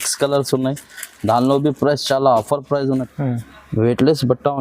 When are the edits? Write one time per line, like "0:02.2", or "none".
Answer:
0:03.1